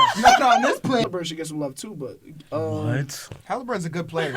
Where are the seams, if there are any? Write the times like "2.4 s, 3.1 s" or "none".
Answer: 1.0 s